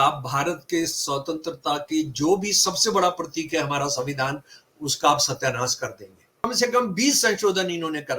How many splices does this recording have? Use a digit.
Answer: 1